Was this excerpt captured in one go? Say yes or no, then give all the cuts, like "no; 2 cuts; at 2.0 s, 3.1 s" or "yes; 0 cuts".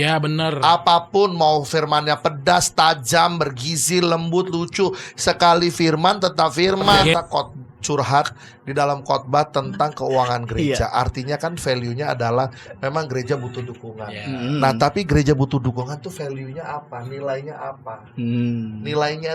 no; 1 cut; at 7.1 s